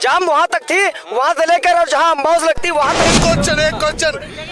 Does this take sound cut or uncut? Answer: cut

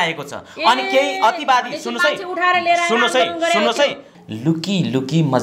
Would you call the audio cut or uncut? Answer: cut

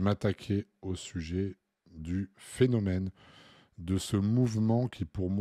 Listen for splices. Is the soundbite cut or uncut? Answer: uncut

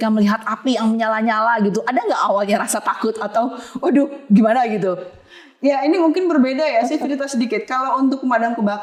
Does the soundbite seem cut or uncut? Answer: uncut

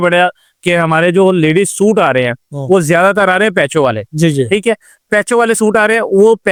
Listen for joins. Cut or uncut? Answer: uncut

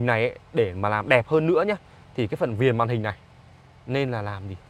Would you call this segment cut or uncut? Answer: uncut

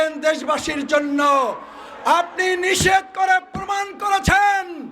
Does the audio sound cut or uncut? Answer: uncut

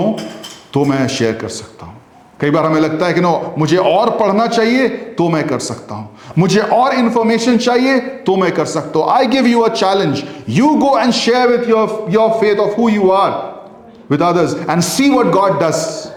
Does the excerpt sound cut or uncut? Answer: uncut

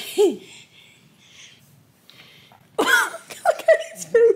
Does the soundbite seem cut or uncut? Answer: cut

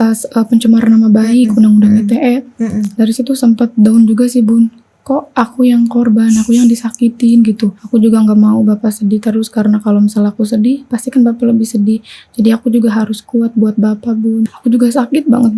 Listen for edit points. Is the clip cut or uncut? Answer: cut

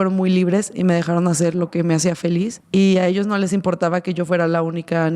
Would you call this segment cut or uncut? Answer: cut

